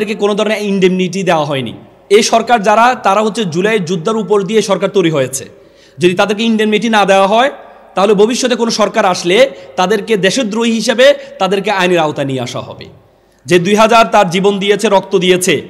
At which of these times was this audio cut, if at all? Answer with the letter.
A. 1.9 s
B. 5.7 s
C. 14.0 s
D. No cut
A